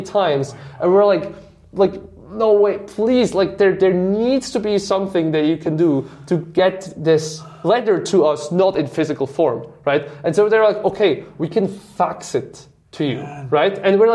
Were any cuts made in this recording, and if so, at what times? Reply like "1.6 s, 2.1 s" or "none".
none